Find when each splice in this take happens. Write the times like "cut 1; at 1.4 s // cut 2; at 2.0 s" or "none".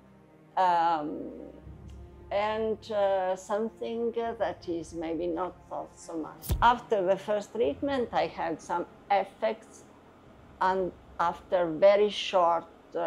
cut 1; at 6.4 s